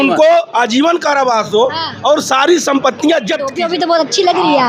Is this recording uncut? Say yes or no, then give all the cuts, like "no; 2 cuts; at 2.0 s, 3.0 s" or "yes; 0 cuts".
no; 1 cut; at 3.6 s